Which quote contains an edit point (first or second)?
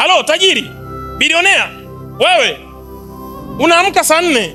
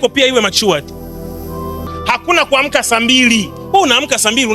second